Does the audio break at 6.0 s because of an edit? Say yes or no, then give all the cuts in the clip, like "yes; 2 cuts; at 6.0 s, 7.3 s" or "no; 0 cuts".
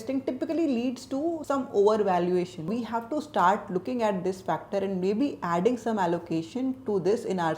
no; 1 cut; at 2.7 s